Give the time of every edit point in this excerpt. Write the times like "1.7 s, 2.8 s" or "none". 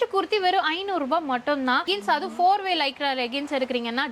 1.8 s